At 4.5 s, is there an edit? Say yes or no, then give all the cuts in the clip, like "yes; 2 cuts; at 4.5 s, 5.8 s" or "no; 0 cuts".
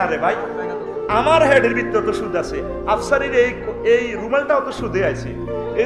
no; 0 cuts